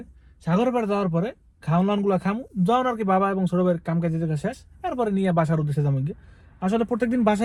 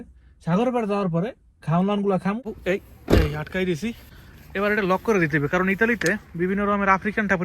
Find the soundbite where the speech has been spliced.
second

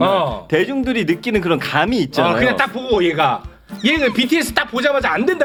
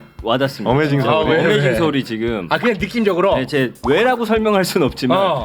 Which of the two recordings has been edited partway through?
second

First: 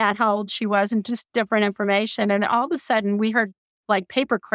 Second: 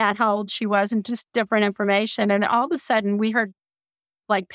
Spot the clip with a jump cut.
first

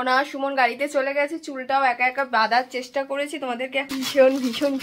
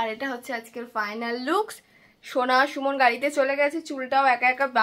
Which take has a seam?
first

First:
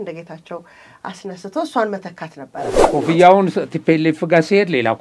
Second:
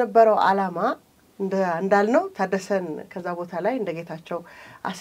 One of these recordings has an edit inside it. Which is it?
first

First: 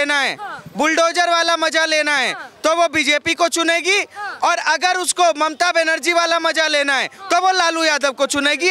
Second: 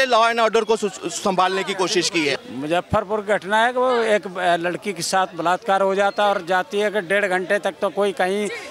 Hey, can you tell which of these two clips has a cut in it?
second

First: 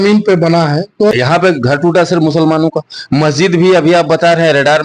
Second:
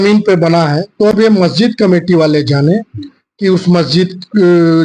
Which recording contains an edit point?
first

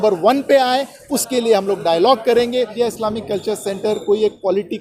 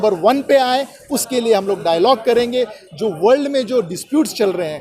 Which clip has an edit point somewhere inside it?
first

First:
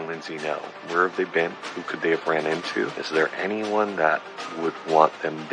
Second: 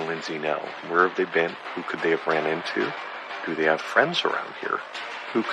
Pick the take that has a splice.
first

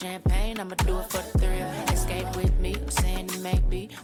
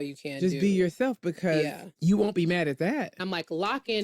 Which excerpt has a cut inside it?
second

